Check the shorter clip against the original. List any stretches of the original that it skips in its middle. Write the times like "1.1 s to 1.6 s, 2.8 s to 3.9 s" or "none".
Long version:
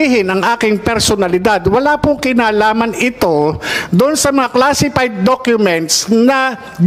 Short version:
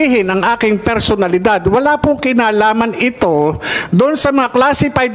none